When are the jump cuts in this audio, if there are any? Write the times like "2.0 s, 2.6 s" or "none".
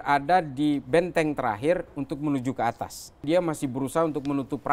3.2 s